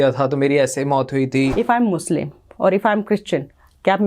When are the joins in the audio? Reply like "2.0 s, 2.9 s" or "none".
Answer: 1.5 s